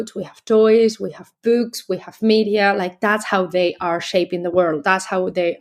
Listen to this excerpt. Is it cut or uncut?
uncut